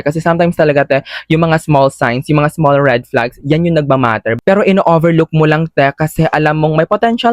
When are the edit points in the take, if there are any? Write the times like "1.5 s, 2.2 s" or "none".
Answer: 4.4 s